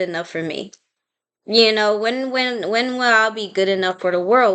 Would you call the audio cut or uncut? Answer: uncut